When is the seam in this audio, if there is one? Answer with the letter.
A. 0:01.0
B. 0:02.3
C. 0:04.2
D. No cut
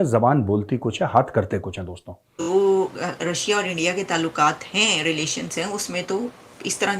B